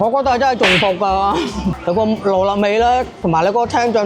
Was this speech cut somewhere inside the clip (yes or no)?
yes